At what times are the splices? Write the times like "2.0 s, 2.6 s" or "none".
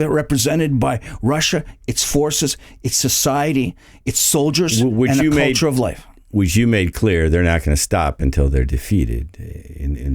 none